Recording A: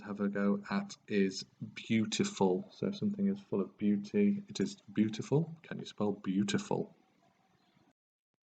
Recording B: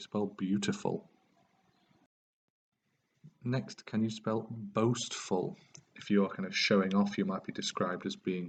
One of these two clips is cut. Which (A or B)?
A